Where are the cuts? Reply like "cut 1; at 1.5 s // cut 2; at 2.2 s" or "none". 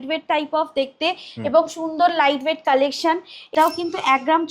cut 1; at 3.4 s